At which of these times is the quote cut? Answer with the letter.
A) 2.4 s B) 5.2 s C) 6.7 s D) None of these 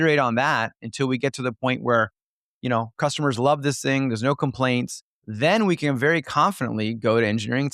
D